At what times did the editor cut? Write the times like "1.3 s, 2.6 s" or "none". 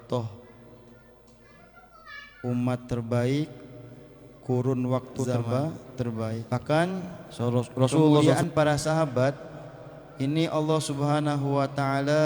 6.4 s, 7.2 s, 8.2 s